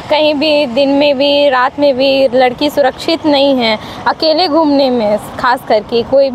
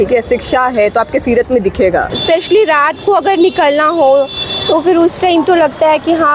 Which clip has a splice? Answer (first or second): second